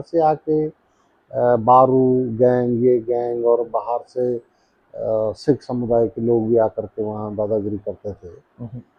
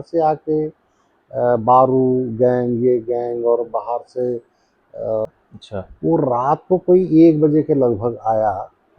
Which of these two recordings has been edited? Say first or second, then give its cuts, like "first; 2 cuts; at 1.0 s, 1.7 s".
second; 1 cut; at 5.3 s